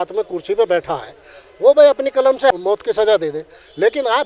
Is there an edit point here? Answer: yes; 1 cut; at 2.5 s

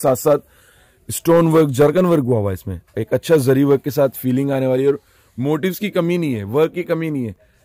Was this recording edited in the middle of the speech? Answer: no; 0 cuts

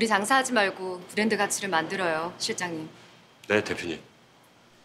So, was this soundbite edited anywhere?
no; 0 cuts

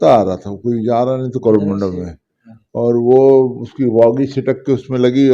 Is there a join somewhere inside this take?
no; 0 cuts

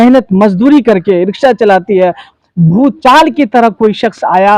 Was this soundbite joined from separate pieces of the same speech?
yes; 1 cut; at 2.3 s

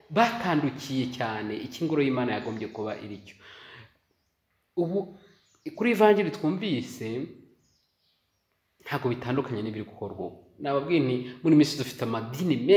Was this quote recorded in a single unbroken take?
yes; 0 cuts

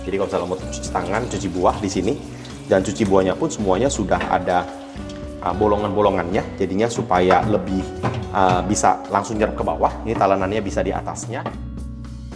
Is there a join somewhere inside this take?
yes; 1 cut; at 11.3 s

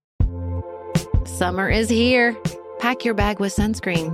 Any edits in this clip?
yes; 1 cut; at 1.0 s

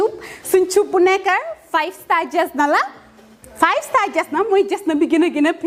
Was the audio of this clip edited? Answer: no; 0 cuts

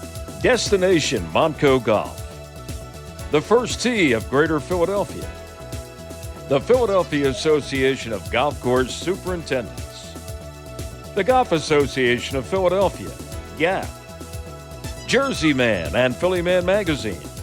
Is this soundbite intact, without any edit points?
yes; 0 cuts

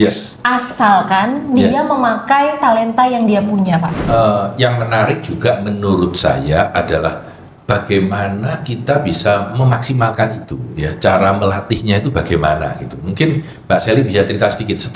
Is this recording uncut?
no; 1 cut; at 4.0 s

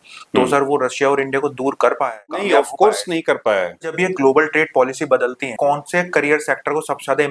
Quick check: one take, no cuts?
no; 3 cuts; at 2.4 s, 4.0 s, 5.5 s

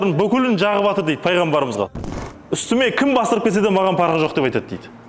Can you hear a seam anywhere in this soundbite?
yes; 1 cut; at 2.0 s

